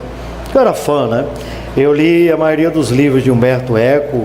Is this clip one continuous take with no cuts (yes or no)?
no